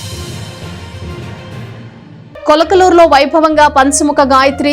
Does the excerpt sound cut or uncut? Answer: cut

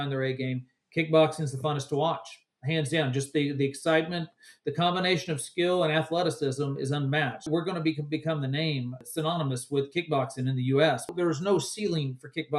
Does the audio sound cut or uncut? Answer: cut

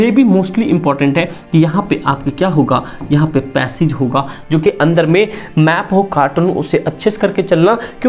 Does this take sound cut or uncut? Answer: cut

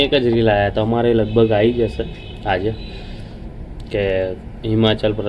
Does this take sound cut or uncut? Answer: uncut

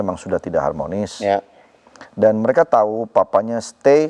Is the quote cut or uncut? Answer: uncut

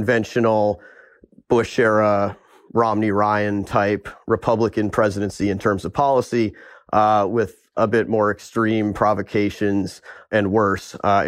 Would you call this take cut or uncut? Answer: uncut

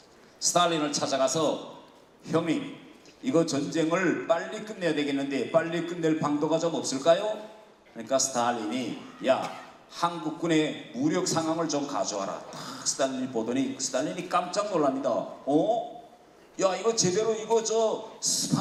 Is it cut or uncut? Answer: uncut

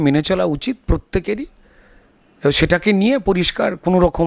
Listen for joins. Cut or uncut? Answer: uncut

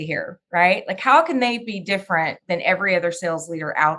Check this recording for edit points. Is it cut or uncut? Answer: uncut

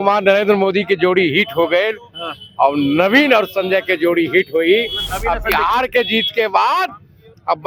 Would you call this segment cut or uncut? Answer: uncut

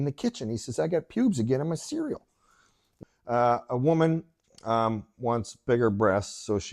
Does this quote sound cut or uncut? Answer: cut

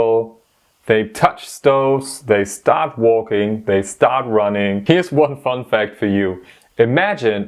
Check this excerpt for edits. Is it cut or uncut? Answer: cut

